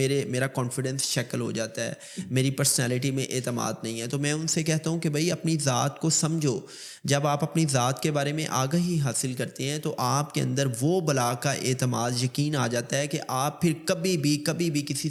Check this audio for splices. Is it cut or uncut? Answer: uncut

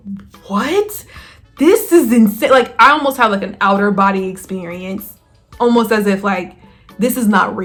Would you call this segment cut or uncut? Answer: uncut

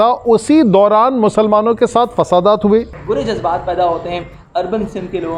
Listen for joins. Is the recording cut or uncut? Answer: cut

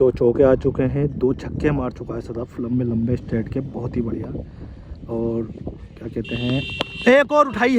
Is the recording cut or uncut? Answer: uncut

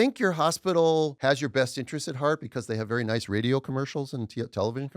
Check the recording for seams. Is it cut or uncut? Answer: cut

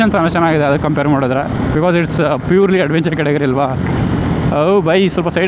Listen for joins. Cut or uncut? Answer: cut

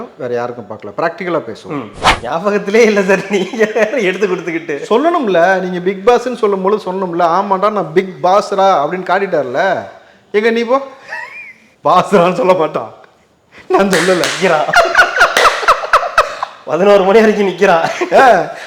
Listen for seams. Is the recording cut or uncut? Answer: cut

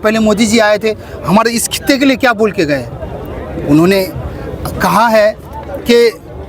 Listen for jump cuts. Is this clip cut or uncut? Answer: uncut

